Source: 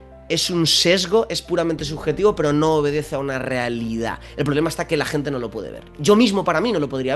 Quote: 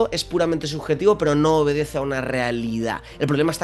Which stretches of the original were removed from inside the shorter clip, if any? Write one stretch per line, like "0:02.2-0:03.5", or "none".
none